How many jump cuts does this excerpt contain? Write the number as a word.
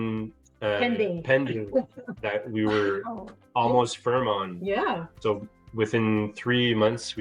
one